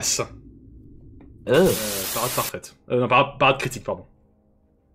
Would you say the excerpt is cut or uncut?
cut